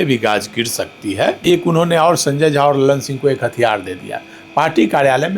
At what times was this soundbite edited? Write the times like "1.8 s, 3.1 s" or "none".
1.4 s